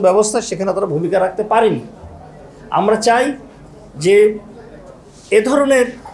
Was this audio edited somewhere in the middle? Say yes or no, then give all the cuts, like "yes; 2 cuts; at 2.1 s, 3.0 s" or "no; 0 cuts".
no; 0 cuts